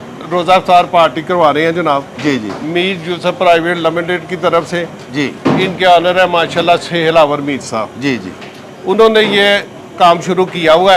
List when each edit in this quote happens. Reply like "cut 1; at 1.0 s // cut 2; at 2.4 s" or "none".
none